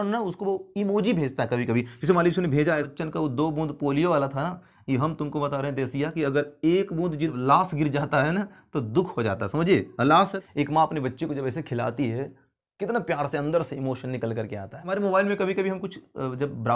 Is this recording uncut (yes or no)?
no